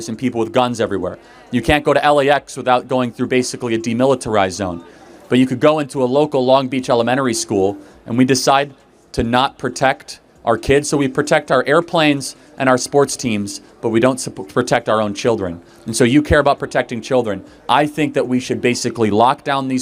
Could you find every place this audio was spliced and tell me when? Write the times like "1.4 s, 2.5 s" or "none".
none